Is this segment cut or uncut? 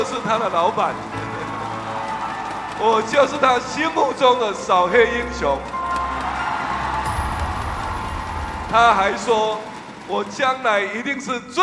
uncut